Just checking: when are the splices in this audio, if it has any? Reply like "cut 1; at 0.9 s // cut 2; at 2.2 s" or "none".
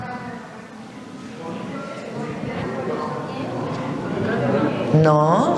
none